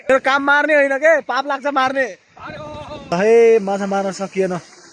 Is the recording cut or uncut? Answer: cut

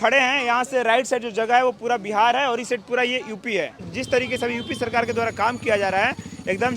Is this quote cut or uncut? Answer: cut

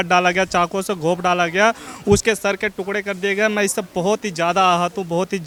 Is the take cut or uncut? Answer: uncut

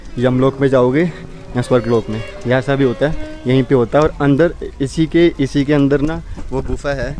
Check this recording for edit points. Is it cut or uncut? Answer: uncut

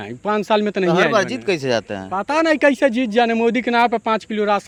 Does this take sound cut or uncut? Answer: uncut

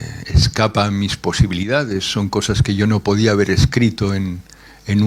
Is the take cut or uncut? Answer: uncut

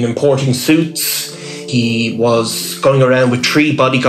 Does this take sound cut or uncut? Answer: cut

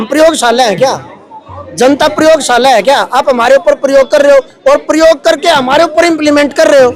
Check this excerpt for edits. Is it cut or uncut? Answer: uncut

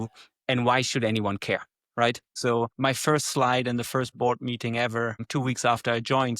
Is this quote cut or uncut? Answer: cut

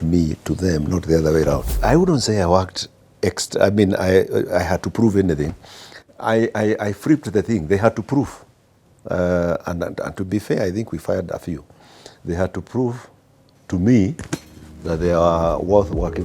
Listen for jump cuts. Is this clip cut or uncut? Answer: cut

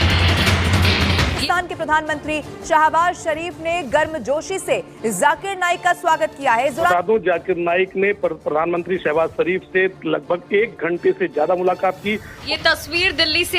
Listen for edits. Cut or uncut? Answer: cut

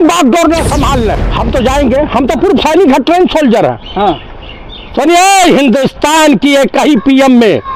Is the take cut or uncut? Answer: cut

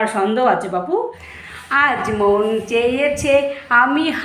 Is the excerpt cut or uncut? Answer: cut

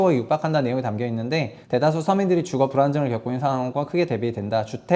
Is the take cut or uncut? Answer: cut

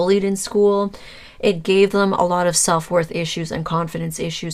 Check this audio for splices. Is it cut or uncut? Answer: uncut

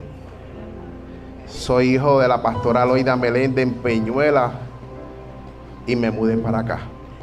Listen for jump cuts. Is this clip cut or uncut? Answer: uncut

